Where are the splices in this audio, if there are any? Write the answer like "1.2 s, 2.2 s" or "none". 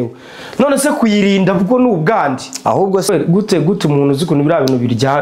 3.1 s

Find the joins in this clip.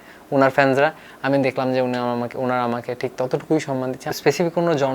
4.1 s

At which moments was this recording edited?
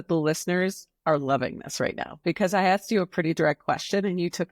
none

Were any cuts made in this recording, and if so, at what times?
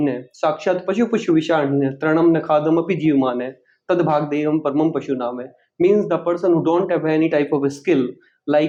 none

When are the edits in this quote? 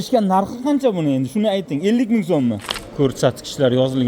2.7 s

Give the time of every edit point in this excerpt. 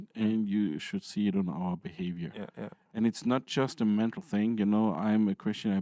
none

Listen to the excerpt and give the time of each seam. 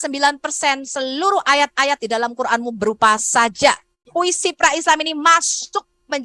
3.9 s

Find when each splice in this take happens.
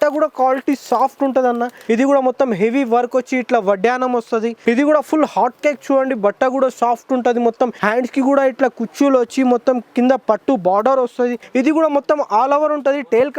1.7 s, 4.5 s, 7.8 s, 11.4 s

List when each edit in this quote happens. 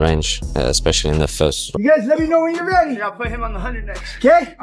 1.7 s

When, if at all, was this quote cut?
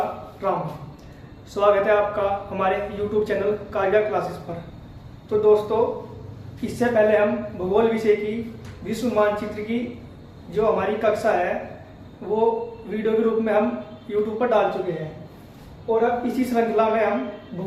none

